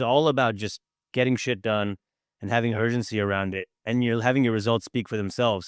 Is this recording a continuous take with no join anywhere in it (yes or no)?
yes